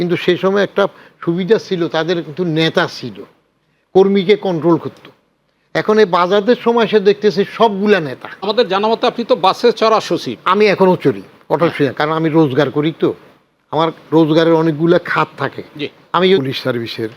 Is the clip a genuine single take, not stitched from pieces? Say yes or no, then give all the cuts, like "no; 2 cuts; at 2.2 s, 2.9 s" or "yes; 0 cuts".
no; 2 cuts; at 8.4 s, 16.4 s